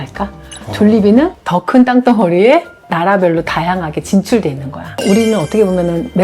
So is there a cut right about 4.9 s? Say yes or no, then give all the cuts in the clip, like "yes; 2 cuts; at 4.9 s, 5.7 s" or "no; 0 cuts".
yes; 1 cut; at 4.9 s